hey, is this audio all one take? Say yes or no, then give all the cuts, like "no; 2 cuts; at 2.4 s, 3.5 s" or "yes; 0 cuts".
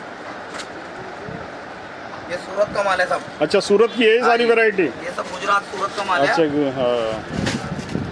yes; 0 cuts